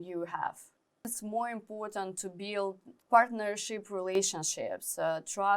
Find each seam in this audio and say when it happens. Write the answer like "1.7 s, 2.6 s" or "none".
1.1 s, 2.9 s